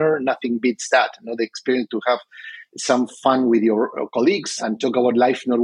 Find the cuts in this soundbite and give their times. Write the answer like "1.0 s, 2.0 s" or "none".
4.5 s